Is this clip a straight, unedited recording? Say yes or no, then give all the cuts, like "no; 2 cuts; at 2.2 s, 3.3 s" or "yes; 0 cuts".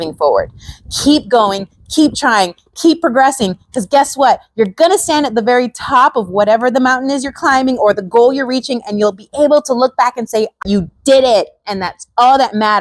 no; 1 cut; at 10.6 s